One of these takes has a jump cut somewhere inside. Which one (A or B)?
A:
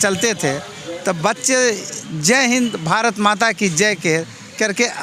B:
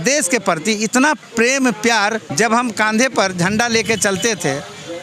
B